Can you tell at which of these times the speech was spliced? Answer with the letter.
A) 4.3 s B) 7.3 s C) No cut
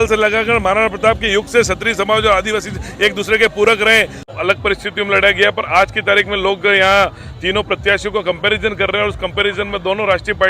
A